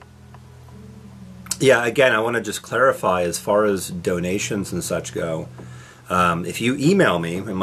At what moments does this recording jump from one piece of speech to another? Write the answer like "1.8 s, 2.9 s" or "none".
5.5 s